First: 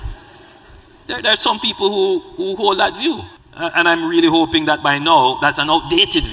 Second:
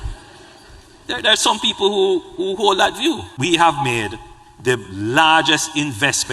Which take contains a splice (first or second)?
second